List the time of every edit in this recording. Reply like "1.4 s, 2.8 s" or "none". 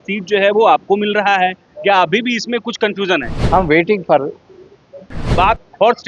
3.3 s, 5.2 s